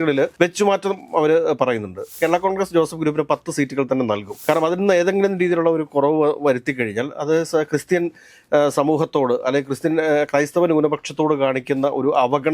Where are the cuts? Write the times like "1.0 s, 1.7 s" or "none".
2.1 s